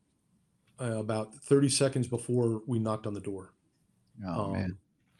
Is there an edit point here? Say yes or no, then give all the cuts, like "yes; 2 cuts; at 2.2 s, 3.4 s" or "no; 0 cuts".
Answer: no; 0 cuts